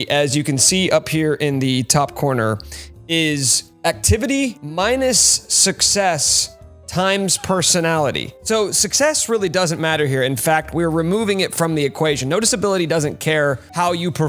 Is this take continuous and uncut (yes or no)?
yes